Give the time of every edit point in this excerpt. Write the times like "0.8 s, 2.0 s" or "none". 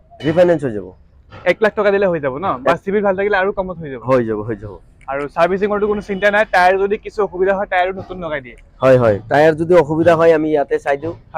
none